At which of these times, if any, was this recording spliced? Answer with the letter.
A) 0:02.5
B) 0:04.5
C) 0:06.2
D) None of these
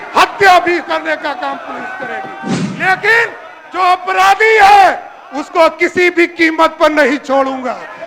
A